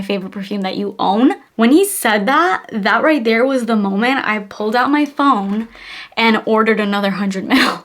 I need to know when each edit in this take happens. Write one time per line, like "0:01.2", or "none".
none